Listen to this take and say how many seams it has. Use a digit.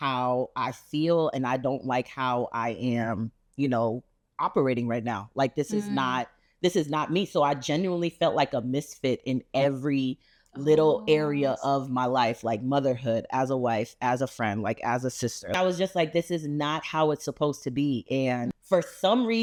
0